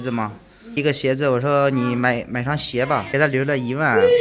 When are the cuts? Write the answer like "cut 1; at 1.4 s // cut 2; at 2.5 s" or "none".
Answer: cut 1; at 0.8 s // cut 2; at 3.1 s